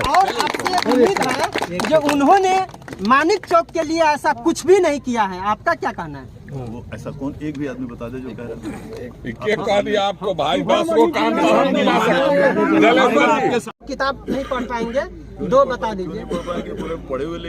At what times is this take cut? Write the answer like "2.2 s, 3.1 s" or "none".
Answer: 13.9 s